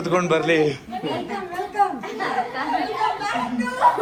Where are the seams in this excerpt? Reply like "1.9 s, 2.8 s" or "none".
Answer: none